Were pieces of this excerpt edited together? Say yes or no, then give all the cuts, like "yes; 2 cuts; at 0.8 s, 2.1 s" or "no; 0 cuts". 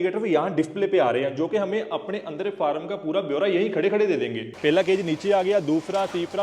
yes; 1 cut; at 4.5 s